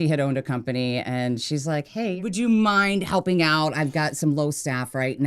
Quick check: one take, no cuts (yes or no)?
no